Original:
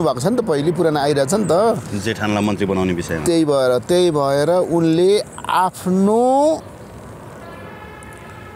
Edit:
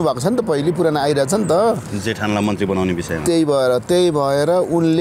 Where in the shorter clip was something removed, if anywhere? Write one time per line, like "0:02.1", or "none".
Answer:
none